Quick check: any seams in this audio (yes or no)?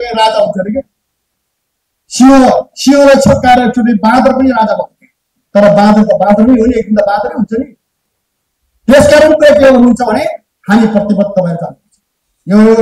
no